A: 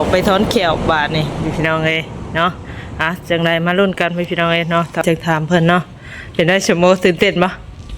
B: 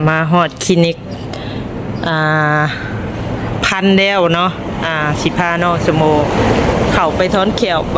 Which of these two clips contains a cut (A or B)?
A